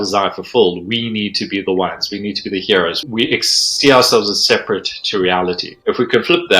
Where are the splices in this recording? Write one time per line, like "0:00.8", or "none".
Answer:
0:03.0
0:05.7